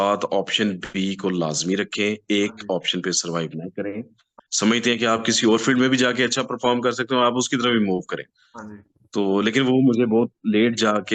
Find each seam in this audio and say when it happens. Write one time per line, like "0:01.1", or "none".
0:04.4